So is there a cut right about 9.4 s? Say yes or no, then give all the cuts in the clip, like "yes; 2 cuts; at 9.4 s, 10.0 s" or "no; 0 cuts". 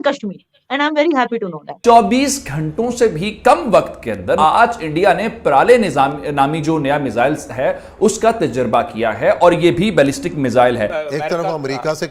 no; 3 cuts; at 1.8 s, 4.4 s, 10.9 s